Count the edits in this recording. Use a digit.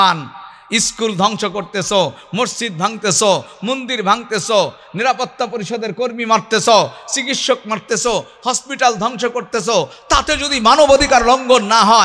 0